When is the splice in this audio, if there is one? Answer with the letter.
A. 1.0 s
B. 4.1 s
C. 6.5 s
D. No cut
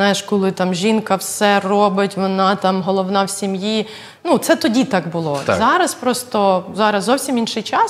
D